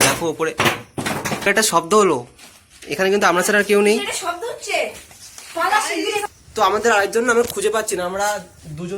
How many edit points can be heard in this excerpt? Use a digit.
2